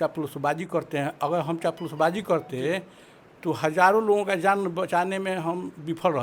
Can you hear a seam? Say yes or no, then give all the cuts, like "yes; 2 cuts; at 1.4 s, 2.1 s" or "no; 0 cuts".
no; 0 cuts